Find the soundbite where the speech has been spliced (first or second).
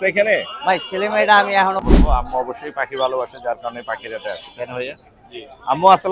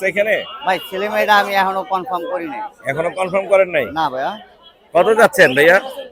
first